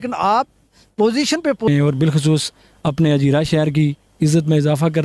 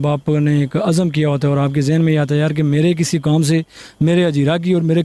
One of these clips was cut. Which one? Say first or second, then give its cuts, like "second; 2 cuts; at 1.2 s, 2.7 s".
first; 1 cut; at 1.7 s